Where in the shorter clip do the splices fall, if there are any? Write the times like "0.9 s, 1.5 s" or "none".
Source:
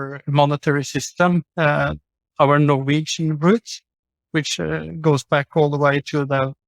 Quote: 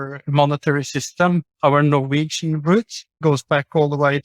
1.5 s, 3.1 s